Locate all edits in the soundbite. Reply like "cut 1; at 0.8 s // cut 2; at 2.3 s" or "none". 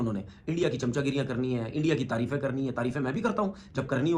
none